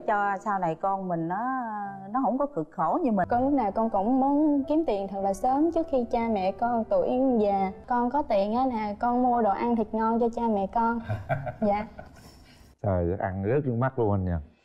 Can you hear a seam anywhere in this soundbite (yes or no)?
yes